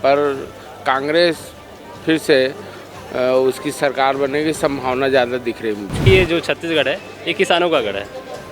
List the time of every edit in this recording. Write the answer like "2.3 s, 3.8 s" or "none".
6.0 s